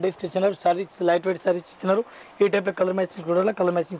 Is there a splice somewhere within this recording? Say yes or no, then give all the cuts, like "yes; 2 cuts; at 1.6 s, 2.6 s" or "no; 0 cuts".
no; 0 cuts